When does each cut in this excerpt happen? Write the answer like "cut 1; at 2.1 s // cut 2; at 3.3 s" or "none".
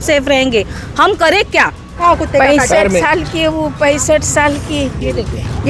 cut 1; at 1.9 s

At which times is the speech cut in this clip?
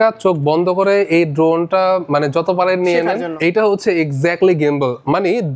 cut 1; at 3.3 s

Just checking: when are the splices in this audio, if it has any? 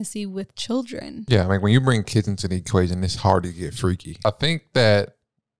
cut 1; at 1.1 s // cut 2; at 4.2 s

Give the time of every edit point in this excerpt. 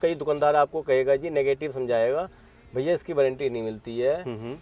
none

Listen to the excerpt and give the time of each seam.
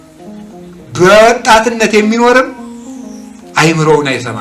cut 1; at 1.0 s

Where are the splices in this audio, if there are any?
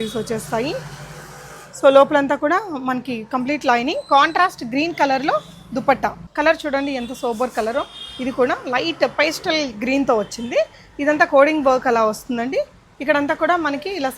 cut 1; at 6.2 s

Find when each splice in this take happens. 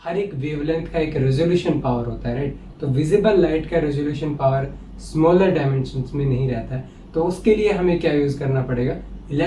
none

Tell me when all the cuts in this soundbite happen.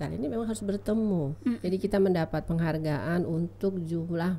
cut 1; at 1.6 s

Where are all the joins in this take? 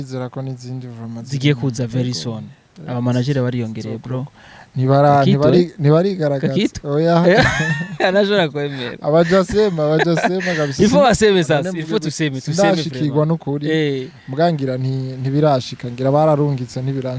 none

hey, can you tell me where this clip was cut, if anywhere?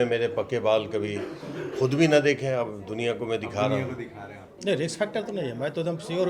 cut 1; at 4.4 s

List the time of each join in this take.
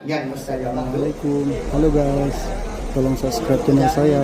cut 1; at 1.1 s

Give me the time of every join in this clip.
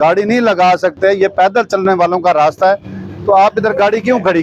none

